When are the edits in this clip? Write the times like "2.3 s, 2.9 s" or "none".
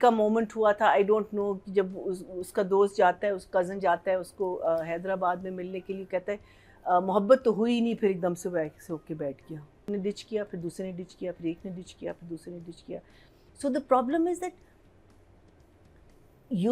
9.8 s